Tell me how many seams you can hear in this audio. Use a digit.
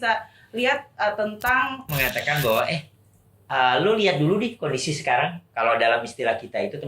1